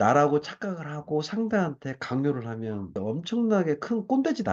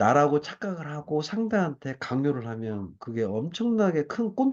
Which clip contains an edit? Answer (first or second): first